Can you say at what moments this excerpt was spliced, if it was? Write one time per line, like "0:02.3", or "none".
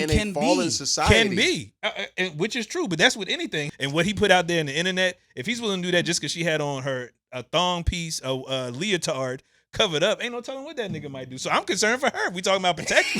0:03.7